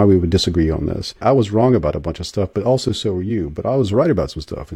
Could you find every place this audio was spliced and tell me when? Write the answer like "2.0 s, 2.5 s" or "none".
1.2 s